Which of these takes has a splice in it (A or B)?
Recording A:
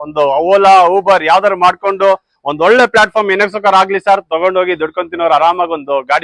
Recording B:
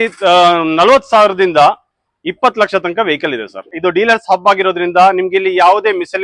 B